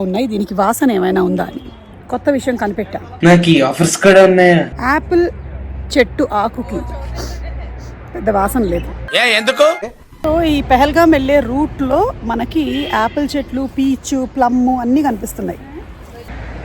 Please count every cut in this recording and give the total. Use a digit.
0